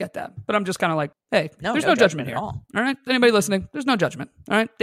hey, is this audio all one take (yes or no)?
no